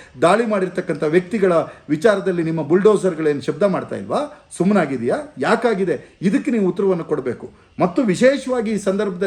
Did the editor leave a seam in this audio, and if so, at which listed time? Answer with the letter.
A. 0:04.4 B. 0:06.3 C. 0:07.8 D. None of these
D